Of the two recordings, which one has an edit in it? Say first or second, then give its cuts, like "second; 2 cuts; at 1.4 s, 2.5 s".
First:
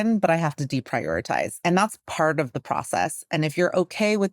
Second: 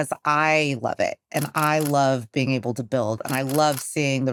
first; 1 cut; at 1.5 s